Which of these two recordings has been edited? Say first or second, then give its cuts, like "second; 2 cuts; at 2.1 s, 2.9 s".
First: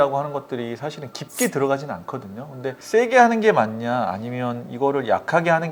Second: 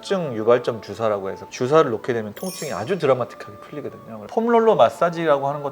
second; 1 cut; at 4.3 s